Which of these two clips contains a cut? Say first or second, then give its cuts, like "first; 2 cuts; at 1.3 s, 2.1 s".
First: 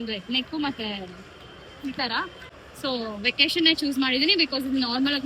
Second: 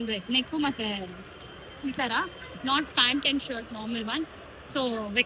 first; 1 cut; at 2.5 s